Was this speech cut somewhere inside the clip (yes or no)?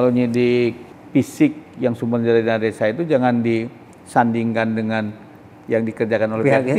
yes